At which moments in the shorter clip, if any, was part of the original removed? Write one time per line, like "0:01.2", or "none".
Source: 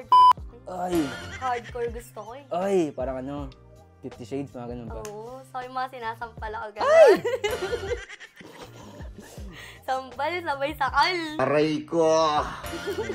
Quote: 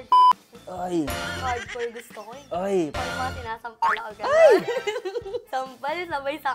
0:02.9
0:05.5